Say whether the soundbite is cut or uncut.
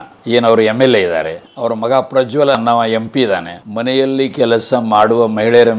cut